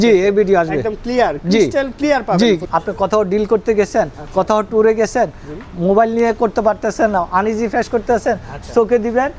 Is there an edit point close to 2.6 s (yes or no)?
yes